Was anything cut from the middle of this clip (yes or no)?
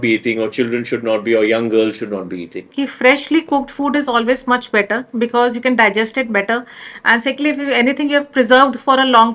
yes